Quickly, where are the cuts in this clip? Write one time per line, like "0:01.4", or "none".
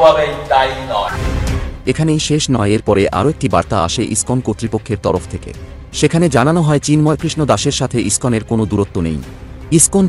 0:01.0